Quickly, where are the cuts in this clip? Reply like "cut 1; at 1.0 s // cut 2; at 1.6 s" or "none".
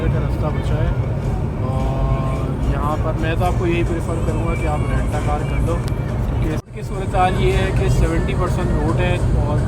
cut 1; at 6.7 s